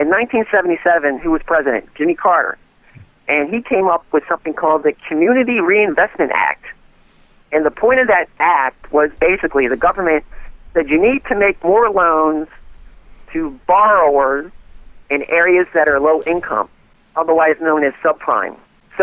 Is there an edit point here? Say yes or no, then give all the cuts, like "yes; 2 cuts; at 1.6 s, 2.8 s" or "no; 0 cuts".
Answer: no; 0 cuts